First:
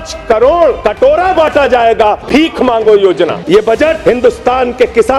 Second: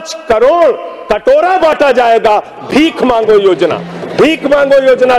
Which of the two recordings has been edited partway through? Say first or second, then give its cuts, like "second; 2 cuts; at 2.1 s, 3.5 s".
first; 3 cuts; at 0.8 s, 2.2 s, 3.6 s